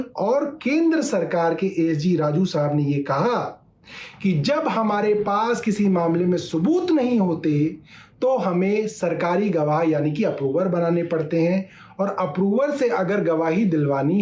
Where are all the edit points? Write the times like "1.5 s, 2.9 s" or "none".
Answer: none